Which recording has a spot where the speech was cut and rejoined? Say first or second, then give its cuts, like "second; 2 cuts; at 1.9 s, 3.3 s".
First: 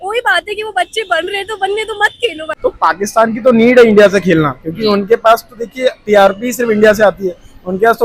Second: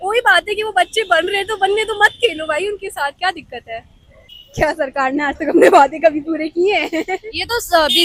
first; 1 cut; at 2.5 s